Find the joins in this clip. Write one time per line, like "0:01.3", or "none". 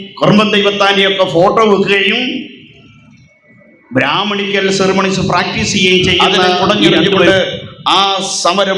0:07.3